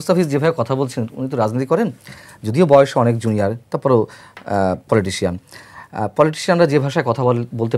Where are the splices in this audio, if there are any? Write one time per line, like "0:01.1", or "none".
none